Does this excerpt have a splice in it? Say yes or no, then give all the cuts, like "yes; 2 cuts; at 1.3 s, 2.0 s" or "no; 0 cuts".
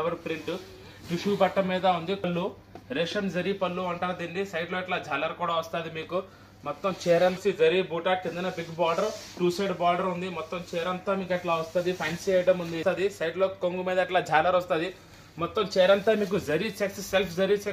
yes; 3 cuts; at 2.3 s, 7.4 s, 12.8 s